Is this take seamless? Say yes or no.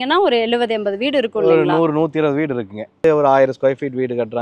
no